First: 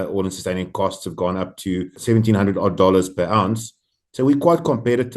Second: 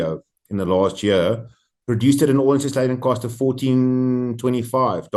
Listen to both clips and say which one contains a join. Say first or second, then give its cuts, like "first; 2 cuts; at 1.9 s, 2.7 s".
first; 1 cut; at 2.0 s